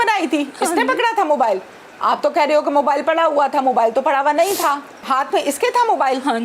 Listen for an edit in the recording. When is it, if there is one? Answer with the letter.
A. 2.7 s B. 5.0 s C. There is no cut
B